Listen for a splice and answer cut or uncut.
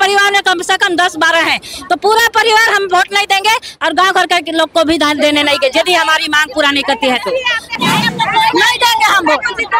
cut